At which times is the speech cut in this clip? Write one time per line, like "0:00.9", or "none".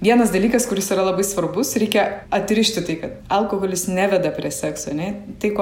0:02.2
0:03.1